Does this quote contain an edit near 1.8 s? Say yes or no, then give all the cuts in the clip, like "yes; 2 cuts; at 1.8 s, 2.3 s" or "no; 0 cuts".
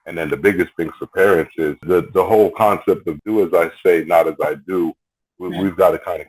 yes; 2 cuts; at 1.8 s, 3.1 s